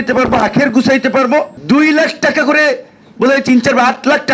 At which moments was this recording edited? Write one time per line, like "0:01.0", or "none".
0:01.5